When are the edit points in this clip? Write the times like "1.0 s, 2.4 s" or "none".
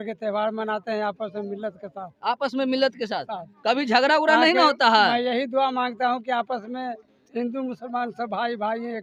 none